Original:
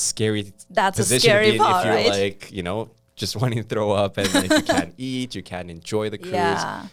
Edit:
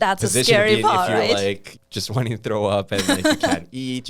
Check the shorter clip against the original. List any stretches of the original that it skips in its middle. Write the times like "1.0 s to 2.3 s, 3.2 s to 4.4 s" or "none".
2.5 s to 3.0 s